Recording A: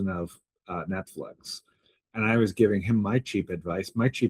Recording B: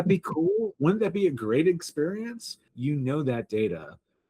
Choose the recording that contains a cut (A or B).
B